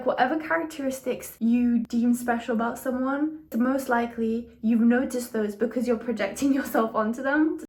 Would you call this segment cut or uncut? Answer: uncut